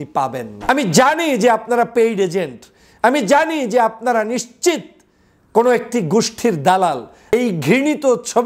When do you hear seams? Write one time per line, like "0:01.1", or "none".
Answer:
0:00.7
0:07.3